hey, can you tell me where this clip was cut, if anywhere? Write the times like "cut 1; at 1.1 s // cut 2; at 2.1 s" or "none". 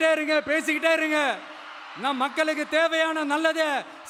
none